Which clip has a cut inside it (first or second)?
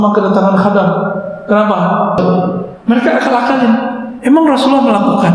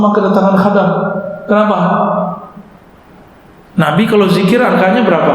first